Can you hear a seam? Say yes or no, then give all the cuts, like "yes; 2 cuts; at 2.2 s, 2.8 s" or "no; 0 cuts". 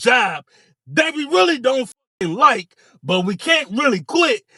no; 0 cuts